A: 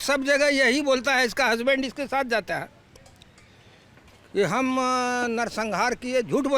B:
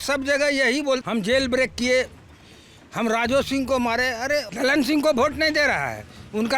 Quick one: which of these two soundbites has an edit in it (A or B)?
B